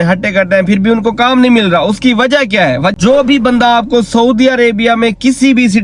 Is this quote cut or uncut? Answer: cut